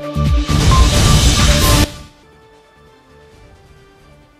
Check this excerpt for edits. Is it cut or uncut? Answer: uncut